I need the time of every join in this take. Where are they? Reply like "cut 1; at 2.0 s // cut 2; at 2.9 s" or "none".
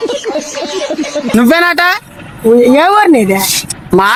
none